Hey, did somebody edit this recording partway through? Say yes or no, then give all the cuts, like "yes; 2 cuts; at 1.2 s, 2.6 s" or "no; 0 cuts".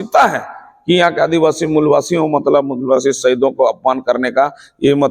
no; 0 cuts